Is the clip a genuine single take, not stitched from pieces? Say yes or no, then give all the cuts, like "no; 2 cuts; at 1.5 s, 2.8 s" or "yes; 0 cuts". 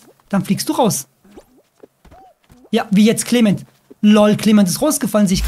yes; 0 cuts